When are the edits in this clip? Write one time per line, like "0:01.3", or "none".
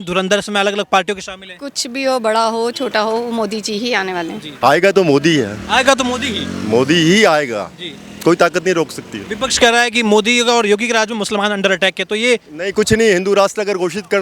0:04.4